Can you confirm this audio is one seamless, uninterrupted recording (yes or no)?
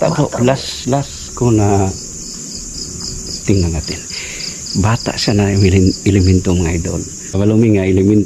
no